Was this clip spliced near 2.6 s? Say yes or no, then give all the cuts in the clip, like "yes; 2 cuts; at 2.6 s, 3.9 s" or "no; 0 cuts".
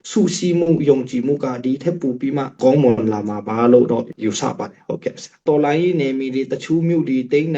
no; 1 cut; at 5.4 s